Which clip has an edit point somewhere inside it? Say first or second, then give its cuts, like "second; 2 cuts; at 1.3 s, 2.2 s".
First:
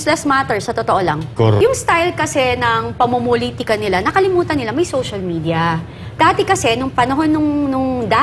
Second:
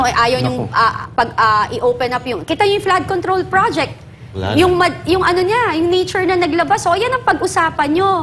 first; 1 cut; at 1.6 s